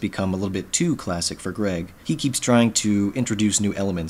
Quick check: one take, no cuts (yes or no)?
yes